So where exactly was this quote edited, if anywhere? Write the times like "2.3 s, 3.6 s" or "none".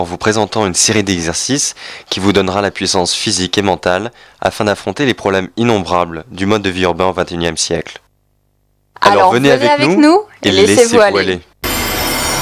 7.2 s